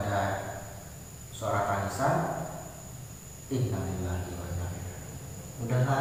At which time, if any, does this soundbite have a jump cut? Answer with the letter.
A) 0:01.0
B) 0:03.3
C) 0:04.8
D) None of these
D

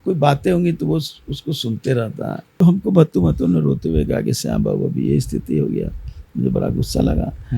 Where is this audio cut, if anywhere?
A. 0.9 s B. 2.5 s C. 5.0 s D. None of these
B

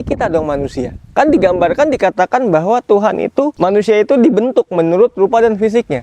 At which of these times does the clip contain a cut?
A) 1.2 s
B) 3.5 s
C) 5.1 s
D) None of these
B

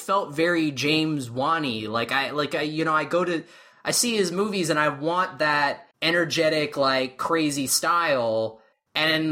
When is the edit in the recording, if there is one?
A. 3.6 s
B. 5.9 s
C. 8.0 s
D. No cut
B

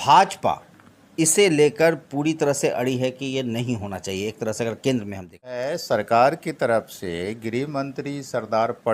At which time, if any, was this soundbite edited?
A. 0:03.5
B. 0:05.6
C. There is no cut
B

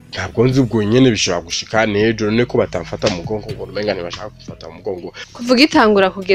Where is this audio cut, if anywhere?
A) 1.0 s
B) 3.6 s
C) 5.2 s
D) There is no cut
C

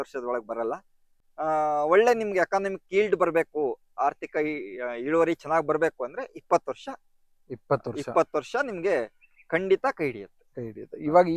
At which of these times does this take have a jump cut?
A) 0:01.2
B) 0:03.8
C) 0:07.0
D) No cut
D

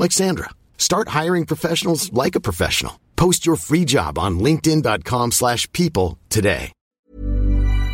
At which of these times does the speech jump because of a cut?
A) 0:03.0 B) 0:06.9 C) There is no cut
B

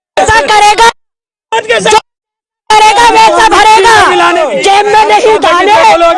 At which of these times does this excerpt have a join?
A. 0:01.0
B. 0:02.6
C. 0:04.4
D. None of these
C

